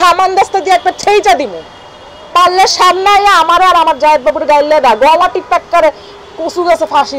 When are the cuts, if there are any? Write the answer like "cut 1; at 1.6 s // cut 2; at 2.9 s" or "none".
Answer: none